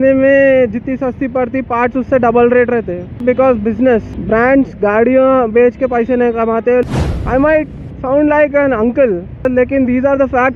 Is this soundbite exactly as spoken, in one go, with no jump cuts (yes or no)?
no